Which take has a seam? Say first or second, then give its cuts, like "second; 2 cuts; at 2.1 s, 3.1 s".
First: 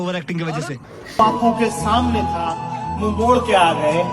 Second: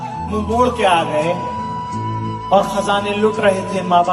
first; 1 cut; at 1.2 s